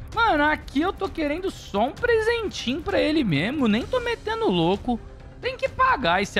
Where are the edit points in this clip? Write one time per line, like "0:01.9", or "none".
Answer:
none